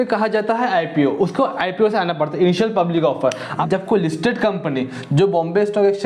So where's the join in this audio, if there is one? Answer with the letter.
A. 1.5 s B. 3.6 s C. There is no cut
B